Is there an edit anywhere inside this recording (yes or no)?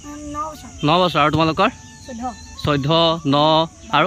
no